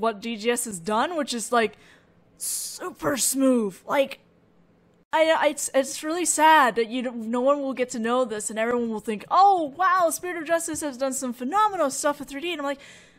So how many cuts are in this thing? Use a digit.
1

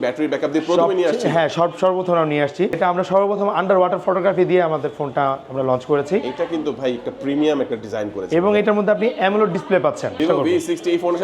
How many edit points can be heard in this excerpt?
2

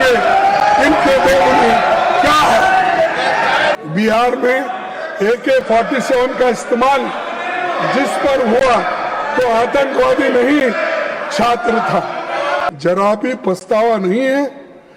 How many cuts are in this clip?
2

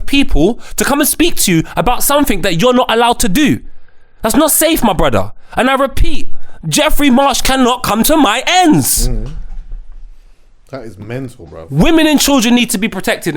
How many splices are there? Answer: 0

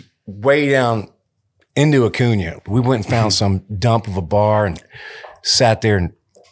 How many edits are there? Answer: 1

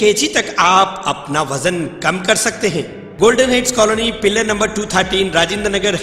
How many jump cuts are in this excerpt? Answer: 1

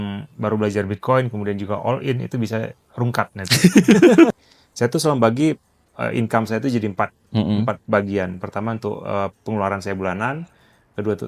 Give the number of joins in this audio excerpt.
1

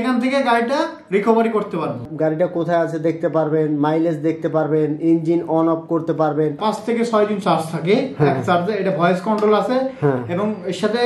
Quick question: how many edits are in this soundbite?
2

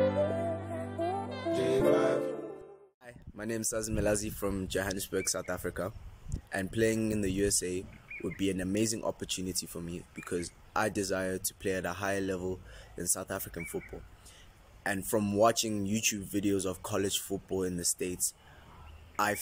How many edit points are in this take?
1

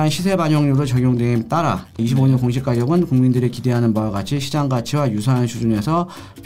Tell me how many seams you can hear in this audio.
1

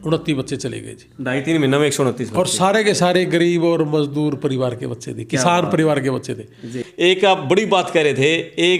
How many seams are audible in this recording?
1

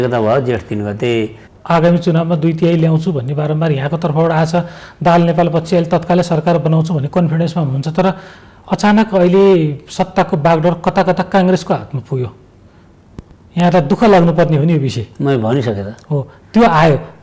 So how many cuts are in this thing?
1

